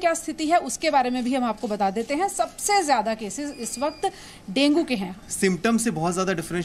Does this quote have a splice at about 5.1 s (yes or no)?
yes